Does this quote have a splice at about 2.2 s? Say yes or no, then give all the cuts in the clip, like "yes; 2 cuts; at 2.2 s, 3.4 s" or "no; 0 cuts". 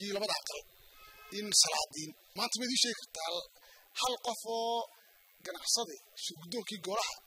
yes; 1 cut; at 2.2 s